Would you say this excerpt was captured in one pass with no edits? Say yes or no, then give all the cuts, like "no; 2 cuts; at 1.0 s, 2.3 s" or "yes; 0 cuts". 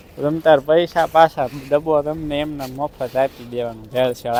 yes; 0 cuts